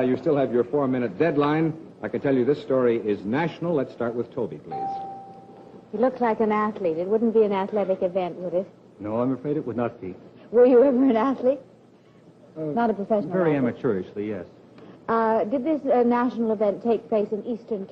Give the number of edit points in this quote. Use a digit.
1